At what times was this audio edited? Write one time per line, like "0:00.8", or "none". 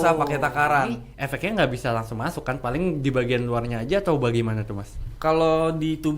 0:01.1